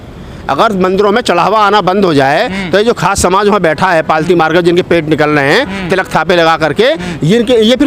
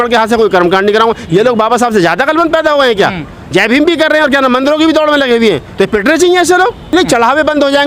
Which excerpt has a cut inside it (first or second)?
second